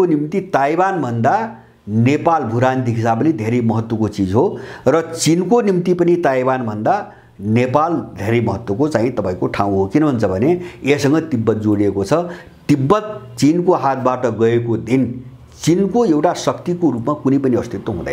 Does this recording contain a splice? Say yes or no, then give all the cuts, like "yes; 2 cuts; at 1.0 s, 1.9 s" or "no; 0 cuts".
no; 0 cuts